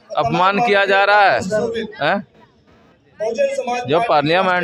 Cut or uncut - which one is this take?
uncut